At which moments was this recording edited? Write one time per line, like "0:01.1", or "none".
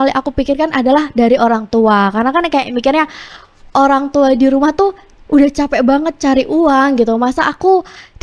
none